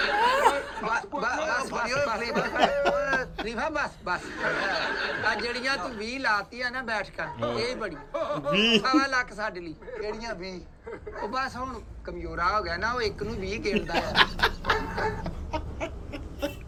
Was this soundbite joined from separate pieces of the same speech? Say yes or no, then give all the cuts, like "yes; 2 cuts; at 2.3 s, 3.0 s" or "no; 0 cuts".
no; 0 cuts